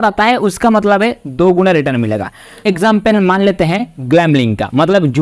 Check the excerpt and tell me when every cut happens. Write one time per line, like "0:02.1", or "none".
0:02.6